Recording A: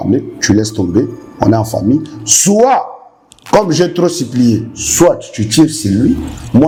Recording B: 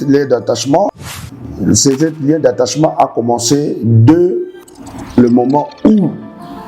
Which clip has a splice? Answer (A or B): B